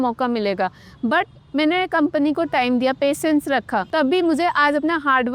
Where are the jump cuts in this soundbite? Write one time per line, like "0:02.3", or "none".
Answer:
0:03.9